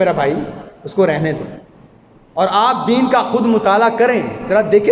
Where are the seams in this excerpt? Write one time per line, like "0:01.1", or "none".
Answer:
none